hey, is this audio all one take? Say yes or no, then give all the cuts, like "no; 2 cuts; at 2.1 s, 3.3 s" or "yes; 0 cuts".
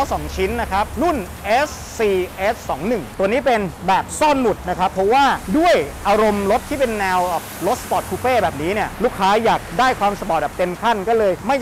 yes; 0 cuts